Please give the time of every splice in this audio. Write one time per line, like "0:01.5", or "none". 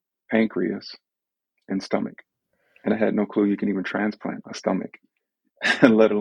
0:02.5